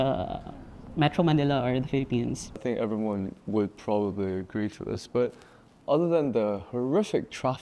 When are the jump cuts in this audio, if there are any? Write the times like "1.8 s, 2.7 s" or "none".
2.6 s